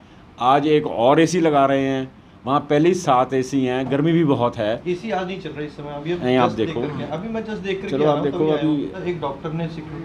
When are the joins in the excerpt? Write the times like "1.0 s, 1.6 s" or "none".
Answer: 9.0 s